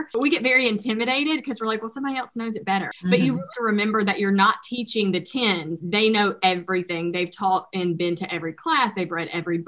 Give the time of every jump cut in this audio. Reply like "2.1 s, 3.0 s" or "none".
5.7 s